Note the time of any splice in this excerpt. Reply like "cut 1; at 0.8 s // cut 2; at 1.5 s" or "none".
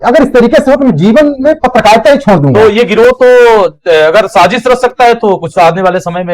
cut 1; at 2.5 s

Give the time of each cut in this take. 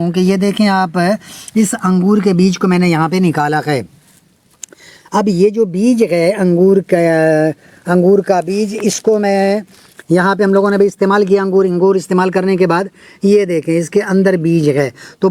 none

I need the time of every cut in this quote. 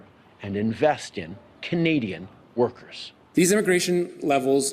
cut 1; at 3.3 s

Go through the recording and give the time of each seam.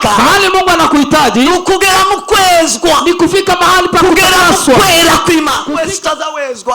cut 1; at 5.6 s

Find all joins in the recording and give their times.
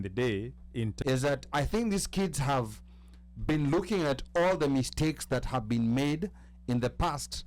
cut 1; at 0.9 s

